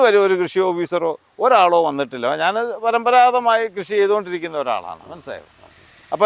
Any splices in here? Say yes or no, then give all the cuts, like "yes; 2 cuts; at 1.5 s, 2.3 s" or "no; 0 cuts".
no; 0 cuts